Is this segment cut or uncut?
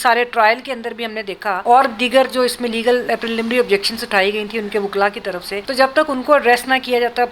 cut